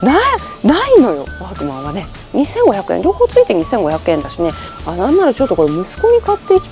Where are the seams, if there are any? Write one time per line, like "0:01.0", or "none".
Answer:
0:02.3
0:04.7